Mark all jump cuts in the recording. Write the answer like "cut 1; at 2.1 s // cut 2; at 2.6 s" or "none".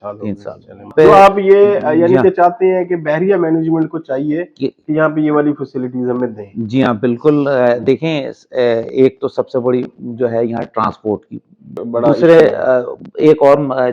cut 1; at 0.9 s // cut 2; at 11.8 s